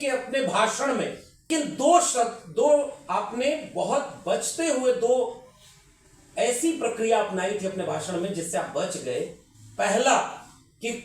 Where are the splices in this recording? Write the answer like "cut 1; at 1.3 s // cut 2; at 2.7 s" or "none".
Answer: cut 1; at 1.5 s